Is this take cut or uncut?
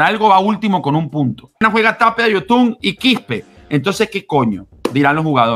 cut